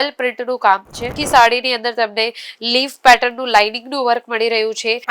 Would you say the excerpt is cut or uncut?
cut